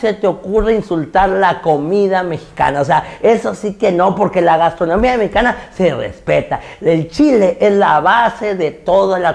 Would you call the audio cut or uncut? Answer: uncut